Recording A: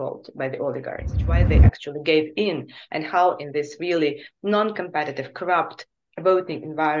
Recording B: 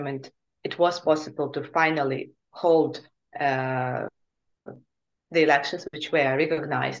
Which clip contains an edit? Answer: A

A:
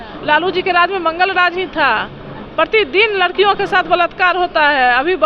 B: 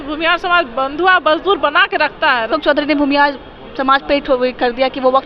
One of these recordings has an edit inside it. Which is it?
B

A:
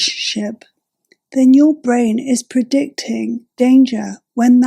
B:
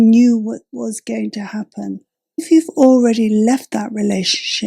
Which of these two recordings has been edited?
B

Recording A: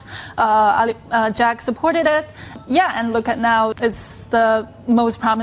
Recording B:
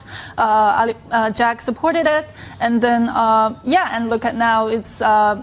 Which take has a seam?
A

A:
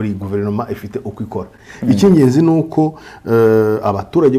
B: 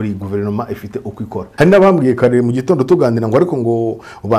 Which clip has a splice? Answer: B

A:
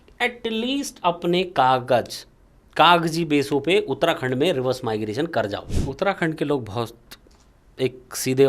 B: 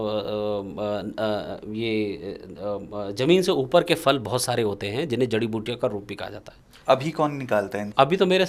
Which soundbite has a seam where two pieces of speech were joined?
A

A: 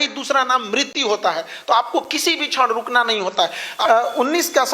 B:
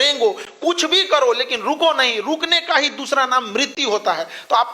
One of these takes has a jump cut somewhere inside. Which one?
A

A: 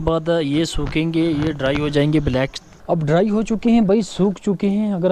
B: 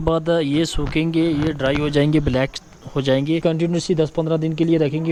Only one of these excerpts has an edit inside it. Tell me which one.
A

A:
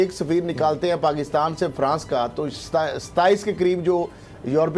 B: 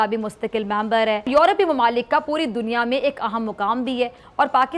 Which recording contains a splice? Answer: B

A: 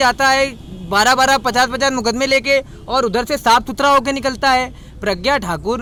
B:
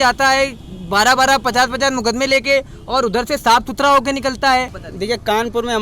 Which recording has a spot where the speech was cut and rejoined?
B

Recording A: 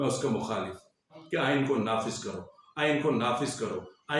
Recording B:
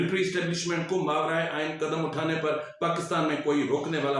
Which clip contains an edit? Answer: A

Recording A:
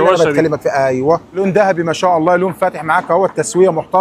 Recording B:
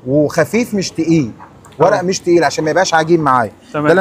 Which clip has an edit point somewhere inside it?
A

